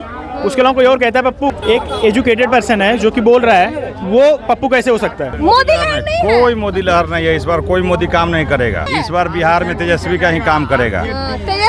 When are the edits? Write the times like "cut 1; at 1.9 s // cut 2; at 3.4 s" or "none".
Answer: cut 1; at 1.6 s // cut 2; at 5.4 s // cut 3; at 8.9 s